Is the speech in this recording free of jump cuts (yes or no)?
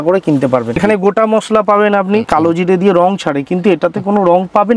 no